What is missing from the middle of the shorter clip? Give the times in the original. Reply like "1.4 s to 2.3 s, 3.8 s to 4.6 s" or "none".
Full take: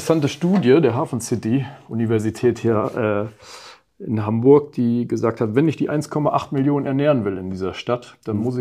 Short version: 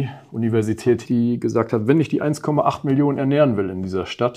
2.6 s to 4.7 s